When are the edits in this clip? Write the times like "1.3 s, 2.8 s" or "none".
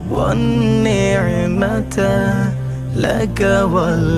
none